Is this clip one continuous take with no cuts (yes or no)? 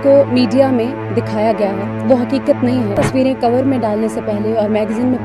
no